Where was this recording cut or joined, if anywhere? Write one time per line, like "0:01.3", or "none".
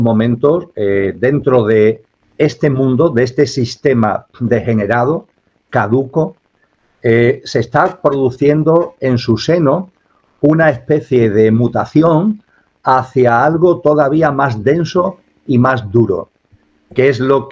none